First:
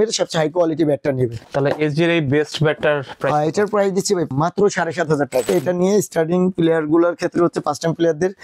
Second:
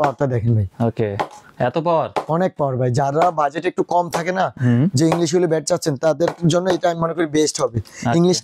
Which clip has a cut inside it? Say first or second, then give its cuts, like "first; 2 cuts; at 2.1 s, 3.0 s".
first; 3 cuts; at 1.4 s, 4.3 s, 5.5 s